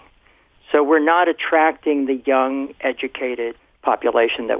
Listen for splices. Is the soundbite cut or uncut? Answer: cut